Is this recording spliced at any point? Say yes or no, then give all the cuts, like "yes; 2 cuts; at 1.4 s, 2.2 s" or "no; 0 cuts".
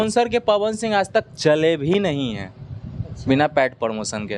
no; 0 cuts